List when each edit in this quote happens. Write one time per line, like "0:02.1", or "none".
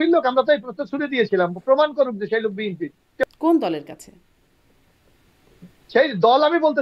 0:03.3